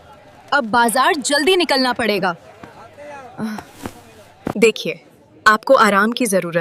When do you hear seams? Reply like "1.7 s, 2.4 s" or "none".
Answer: 4.5 s